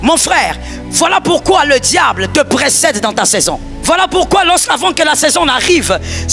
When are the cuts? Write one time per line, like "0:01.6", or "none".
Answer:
0:03.7